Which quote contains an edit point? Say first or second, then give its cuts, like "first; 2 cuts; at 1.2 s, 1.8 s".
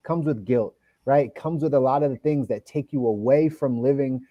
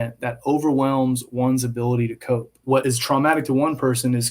second; 1 cut; at 2.7 s